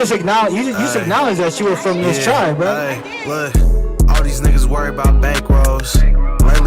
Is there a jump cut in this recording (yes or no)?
yes